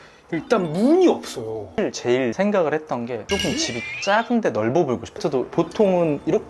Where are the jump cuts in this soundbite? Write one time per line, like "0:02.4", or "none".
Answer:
0:01.7
0:05.2